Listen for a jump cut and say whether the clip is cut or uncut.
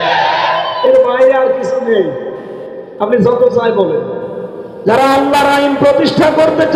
uncut